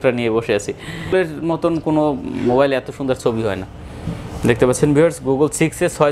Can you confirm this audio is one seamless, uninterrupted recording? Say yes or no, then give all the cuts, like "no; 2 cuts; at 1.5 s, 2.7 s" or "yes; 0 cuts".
no; 1 cut; at 1.1 s